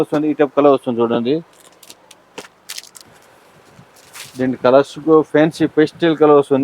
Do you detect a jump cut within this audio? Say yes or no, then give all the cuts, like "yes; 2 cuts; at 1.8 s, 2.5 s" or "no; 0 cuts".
yes; 1 cut; at 3.0 s